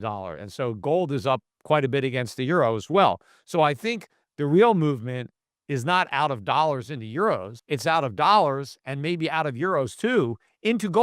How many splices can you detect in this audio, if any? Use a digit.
1